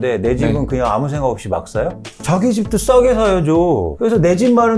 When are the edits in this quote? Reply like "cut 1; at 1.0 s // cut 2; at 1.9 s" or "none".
cut 1; at 2.0 s // cut 2; at 3.9 s